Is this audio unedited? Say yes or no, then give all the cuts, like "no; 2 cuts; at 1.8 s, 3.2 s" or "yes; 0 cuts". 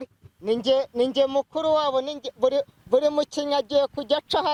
yes; 0 cuts